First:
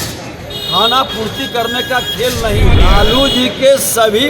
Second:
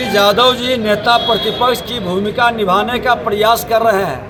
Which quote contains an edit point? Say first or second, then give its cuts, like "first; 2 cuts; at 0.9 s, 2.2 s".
first; 1 cut; at 2.8 s